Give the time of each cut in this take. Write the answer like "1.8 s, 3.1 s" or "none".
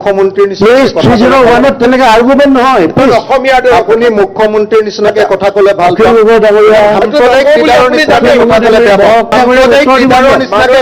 9.3 s

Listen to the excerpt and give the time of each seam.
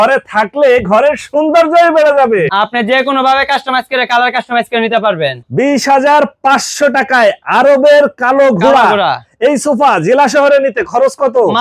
2.5 s, 5.4 s

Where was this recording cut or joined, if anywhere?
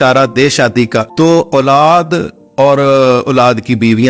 1.1 s

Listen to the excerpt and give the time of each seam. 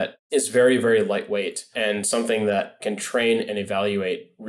1.6 s, 2.8 s

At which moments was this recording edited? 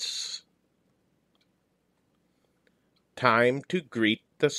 1.6 s

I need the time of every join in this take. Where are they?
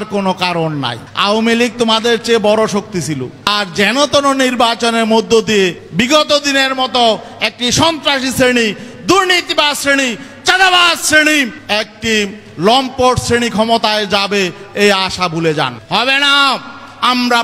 1.0 s, 3.3 s, 5.8 s, 11.6 s, 15.8 s

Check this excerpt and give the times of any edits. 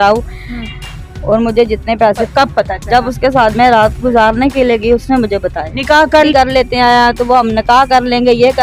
2.3 s, 6.3 s

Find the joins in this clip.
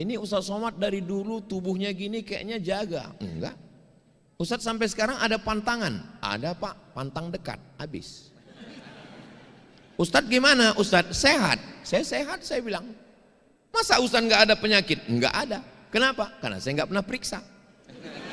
none

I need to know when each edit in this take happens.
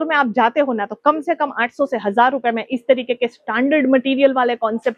none

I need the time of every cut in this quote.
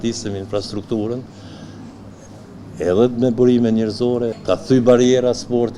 4.3 s

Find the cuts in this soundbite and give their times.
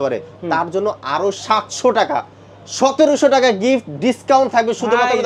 none

